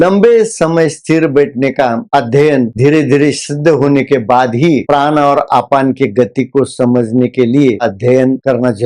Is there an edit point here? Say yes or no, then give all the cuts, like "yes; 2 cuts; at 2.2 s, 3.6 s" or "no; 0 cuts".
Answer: yes; 1 cut; at 7.8 s